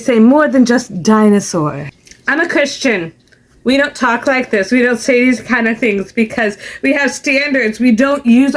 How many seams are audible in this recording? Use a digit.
1